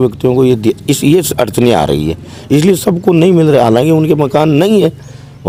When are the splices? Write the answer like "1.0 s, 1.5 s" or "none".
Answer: none